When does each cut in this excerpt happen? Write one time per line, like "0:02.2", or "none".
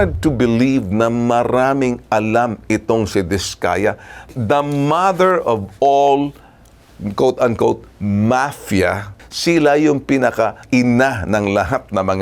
0:09.1
0:10.6